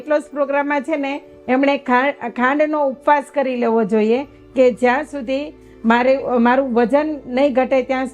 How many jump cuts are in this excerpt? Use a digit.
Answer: 0